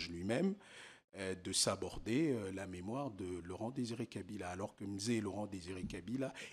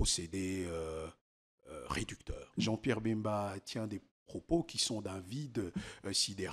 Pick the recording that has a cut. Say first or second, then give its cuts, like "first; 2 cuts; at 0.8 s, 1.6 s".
second; 1 cut; at 2.4 s